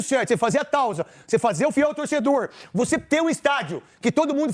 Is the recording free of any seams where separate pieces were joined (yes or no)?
yes